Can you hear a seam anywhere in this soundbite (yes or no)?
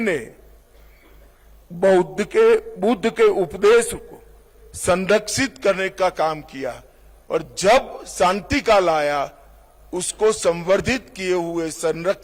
no